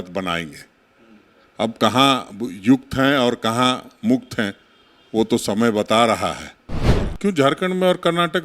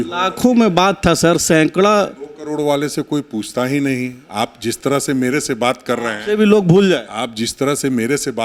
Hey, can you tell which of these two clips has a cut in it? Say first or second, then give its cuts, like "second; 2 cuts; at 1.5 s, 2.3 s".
first; 1 cut; at 6.9 s